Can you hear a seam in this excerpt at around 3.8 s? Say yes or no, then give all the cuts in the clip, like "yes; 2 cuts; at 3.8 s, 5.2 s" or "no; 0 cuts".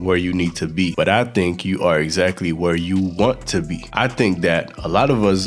yes; 2 cuts; at 0.9 s, 3.8 s